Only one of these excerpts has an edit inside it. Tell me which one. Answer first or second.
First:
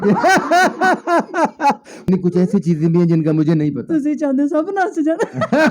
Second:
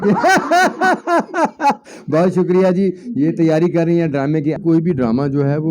first